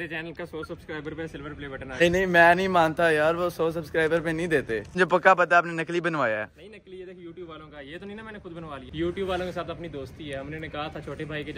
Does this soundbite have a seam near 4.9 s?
yes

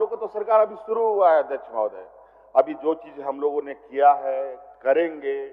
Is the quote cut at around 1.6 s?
no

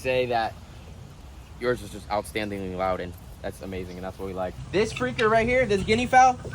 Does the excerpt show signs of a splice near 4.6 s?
yes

